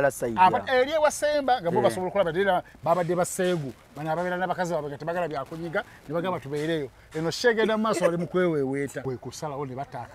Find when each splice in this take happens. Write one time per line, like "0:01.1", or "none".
0:09.0